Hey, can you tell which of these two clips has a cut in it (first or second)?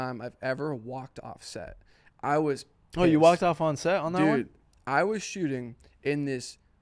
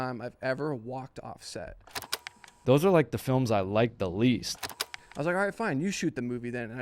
second